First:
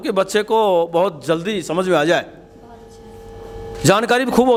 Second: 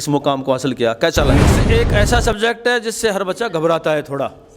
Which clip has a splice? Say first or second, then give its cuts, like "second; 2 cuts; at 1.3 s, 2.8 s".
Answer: second; 1 cut; at 1.6 s